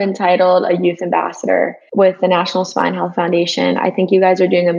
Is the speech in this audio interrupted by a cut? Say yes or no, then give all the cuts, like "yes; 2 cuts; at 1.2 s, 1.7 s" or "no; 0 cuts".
no; 0 cuts